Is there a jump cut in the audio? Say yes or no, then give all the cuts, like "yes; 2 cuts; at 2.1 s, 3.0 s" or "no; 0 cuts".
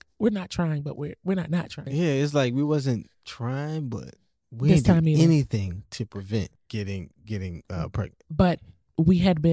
yes; 2 cuts; at 1.8 s, 6.6 s